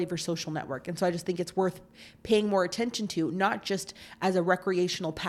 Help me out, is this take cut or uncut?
uncut